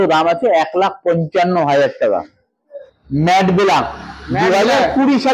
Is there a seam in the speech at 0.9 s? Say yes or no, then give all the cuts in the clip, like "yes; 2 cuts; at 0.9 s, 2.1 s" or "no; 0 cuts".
no; 1 cut; at 2.8 s